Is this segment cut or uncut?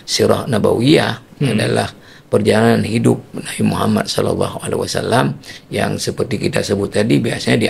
uncut